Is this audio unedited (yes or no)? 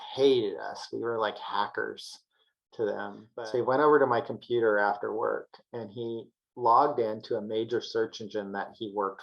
no